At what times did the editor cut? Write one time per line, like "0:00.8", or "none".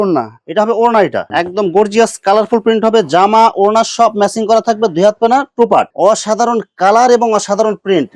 0:01.3
0:05.9